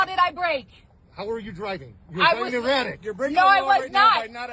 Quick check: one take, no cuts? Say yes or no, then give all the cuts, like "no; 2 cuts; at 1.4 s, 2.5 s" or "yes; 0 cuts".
no; 1 cut; at 3.4 s